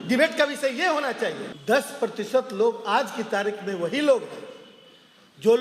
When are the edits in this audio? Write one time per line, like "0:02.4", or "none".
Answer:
0:01.5